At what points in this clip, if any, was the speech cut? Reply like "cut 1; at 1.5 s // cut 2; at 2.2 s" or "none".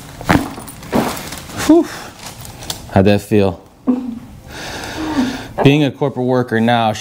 none